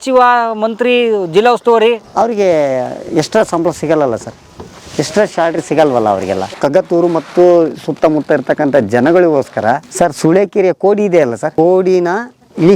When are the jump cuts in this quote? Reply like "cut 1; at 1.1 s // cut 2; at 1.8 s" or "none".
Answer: cut 1; at 6.5 s // cut 2; at 9.9 s // cut 3; at 11.4 s